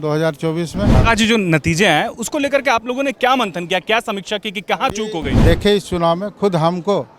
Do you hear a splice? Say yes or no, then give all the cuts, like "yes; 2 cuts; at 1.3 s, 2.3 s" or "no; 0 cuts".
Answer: yes; 2 cuts; at 1.0 s, 5.3 s